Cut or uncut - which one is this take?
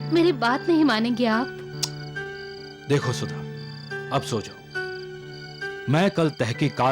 uncut